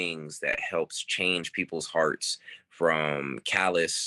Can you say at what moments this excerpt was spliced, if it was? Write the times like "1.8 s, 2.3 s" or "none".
none

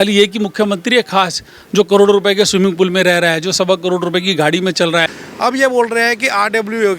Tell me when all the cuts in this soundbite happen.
5.2 s

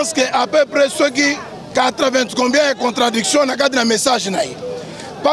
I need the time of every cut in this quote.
none

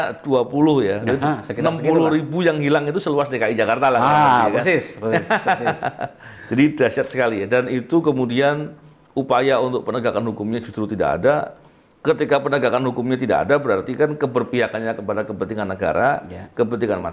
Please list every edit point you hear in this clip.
none

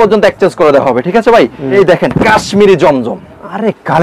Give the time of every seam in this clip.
1.7 s

